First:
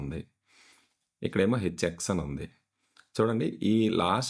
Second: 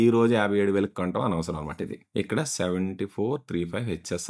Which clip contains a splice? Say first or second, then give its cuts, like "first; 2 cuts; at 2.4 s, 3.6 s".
second; 1 cut; at 2.0 s